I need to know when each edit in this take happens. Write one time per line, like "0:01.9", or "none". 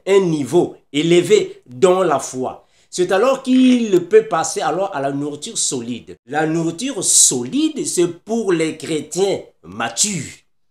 0:06.2